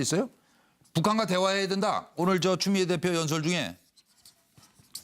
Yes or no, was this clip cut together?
yes